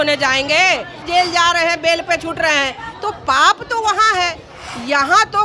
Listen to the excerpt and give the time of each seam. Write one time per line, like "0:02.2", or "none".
0:01.1